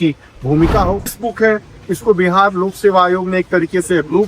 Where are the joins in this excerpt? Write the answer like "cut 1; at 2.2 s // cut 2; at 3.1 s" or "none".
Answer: cut 1; at 1.1 s